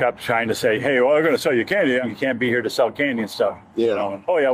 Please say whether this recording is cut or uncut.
cut